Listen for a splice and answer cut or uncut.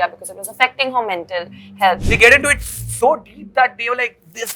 cut